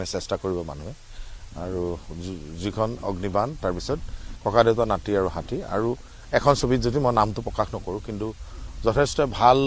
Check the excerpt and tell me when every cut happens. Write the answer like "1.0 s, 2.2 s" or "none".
none